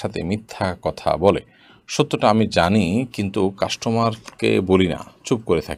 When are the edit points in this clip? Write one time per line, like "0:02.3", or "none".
none